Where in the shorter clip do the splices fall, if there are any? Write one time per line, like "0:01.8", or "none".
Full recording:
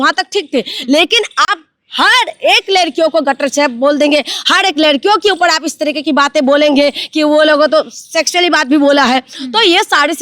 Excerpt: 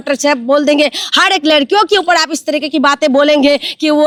none